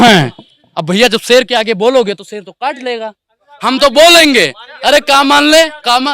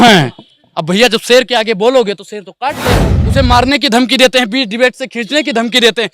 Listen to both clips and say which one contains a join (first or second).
second